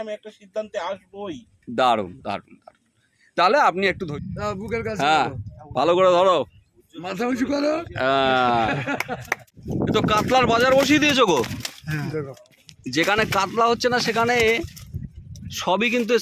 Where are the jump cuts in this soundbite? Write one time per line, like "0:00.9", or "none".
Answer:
0:04.0
0:09.6